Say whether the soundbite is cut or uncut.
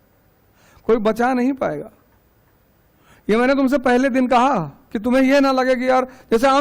uncut